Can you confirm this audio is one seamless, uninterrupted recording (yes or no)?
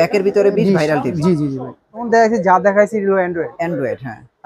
no